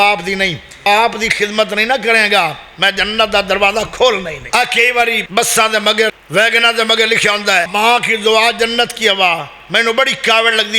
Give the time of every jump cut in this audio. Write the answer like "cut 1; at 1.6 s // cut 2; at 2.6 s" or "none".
cut 1; at 0.8 s // cut 2; at 4.4 s // cut 3; at 5.2 s // cut 4; at 6.1 s // cut 5; at 7.7 s